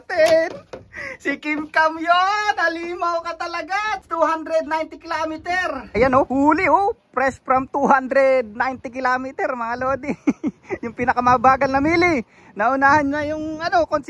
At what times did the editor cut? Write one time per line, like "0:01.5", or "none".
0:04.1
0:05.8